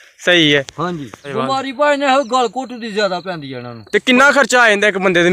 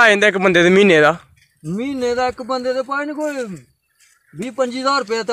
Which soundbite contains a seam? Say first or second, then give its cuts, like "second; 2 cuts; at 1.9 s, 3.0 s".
first; 2 cuts; at 1.3 s, 3.7 s